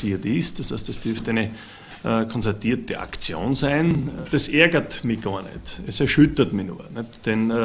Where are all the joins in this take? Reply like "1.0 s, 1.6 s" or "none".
4.1 s